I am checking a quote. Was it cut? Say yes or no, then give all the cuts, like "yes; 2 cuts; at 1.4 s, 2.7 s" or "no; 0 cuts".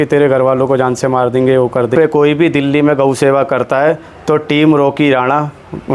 yes; 1 cut; at 1.9 s